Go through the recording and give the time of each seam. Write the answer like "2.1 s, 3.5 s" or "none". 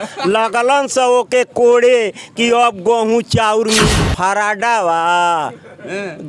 3.9 s